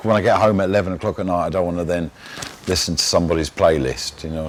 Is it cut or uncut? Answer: uncut